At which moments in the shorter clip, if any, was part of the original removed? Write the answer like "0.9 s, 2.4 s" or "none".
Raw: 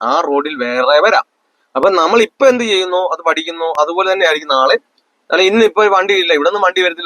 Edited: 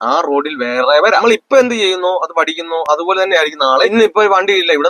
1.2 s, 3.9 s